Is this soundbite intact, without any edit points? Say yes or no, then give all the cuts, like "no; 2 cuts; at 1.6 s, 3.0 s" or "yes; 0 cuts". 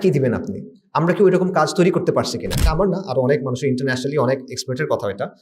no; 1 cut; at 2.6 s